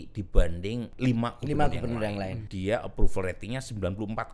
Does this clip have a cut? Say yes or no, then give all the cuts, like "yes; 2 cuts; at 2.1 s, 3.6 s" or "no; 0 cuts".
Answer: yes; 2 cuts; at 0.9 s, 2.4 s